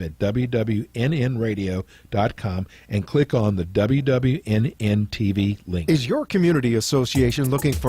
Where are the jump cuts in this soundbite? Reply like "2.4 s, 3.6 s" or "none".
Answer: 5.8 s